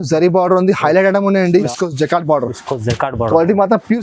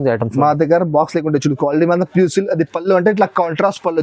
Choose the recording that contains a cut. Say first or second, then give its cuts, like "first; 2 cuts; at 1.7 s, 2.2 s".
first; 1 cut; at 1.7 s